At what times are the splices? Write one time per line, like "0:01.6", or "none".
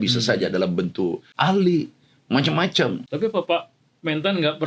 0:01.3
0:03.1